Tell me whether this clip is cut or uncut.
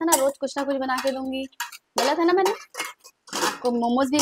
uncut